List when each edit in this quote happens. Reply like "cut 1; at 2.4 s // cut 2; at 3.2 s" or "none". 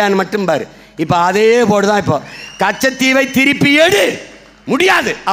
none